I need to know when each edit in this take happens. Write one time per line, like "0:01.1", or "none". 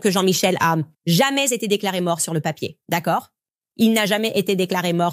0:00.9